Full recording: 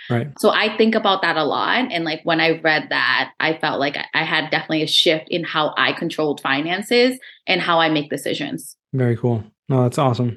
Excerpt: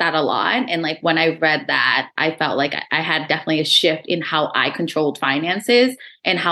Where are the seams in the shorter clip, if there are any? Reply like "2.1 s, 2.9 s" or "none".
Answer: none

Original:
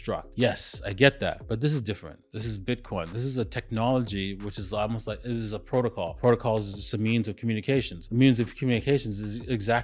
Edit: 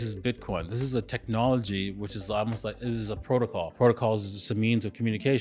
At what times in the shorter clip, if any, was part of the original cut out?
none

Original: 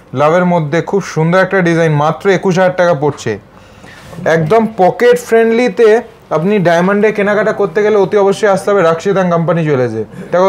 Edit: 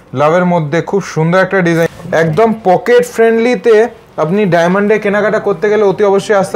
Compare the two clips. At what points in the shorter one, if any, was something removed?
1.9 s

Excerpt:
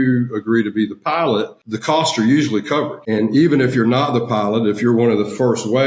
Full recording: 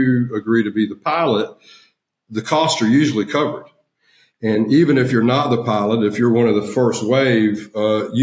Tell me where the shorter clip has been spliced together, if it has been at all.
1.6 s, 3.0 s

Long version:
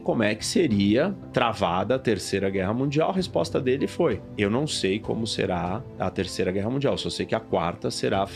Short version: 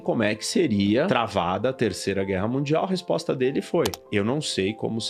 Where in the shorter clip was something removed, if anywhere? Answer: 1.1 s

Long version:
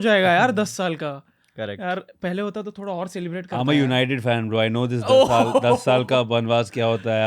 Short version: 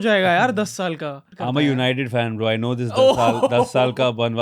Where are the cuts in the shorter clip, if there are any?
1.3 s

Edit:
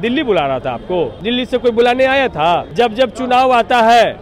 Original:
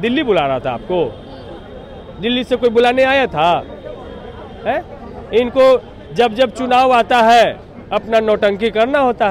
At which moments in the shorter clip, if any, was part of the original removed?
1.2 s, 2.7 s

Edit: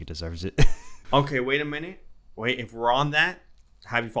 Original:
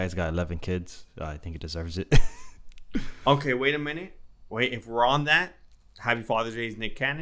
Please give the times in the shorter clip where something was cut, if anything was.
1.0 s

